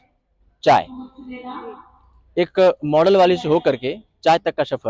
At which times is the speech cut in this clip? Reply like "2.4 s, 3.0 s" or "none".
none